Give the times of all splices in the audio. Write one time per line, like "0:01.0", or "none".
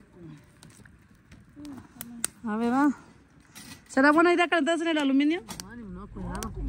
none